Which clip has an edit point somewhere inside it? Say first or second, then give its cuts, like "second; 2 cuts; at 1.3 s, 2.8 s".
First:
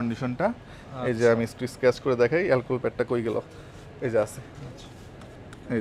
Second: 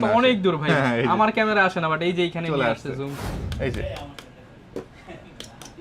second; 1 cut; at 3.2 s